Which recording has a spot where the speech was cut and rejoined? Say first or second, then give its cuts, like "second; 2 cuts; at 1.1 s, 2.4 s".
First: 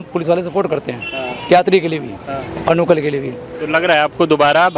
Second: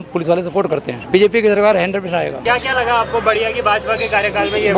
second; 2 cuts; at 1.0 s, 2.4 s